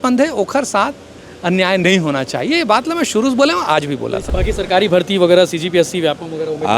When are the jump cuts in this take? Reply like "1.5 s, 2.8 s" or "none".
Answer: 4.2 s